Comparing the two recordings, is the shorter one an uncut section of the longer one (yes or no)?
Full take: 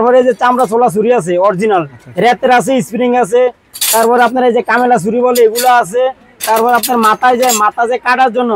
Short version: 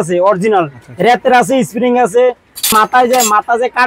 no